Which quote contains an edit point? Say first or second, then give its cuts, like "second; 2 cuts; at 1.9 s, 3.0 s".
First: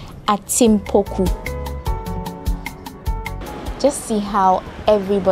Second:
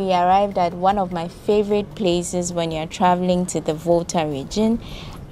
first; 2 cuts; at 1.4 s, 3.4 s